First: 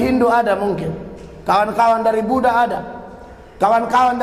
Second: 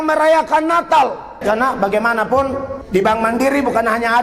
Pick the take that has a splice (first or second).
second